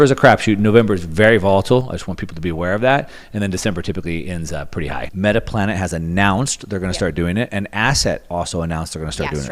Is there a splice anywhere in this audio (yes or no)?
yes